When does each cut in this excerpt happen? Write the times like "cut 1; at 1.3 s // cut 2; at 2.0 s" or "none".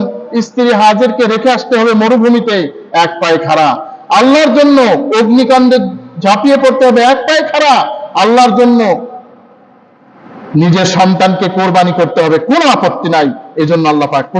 none